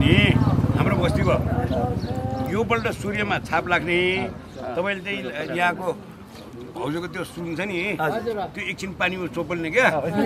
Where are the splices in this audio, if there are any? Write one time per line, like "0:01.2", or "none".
none